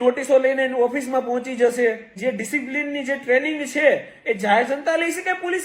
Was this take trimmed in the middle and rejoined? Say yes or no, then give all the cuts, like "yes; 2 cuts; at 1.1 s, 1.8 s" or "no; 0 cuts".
yes; 1 cut; at 2.1 s